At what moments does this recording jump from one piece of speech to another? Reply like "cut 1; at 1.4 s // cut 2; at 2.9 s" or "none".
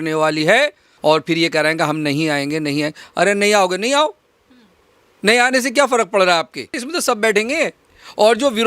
cut 1; at 0.9 s // cut 2; at 6.9 s